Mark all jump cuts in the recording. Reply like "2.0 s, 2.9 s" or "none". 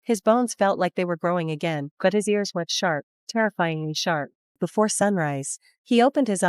4.6 s